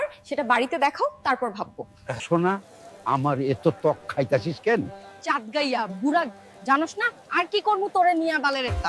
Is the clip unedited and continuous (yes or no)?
no